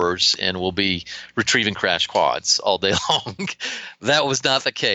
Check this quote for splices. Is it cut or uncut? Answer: uncut